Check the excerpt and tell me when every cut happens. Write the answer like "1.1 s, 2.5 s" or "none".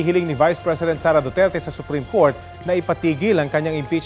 none